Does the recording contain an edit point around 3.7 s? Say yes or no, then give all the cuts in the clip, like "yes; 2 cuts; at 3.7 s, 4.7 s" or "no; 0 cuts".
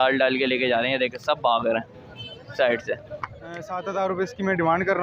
yes; 1 cut; at 3.7 s